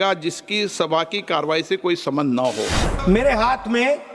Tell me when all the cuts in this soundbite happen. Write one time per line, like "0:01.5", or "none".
0:02.8